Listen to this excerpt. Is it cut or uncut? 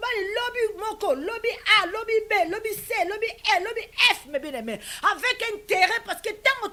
uncut